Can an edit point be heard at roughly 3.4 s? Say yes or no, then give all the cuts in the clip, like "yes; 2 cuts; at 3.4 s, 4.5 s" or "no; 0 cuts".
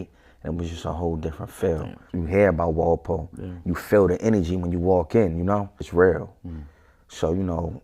no; 2 cuts; at 2.0 s, 5.9 s